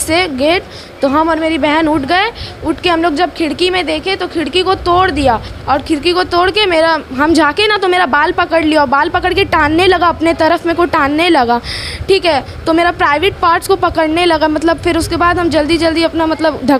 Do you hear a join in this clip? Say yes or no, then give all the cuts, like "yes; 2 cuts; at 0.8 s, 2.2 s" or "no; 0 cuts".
no; 0 cuts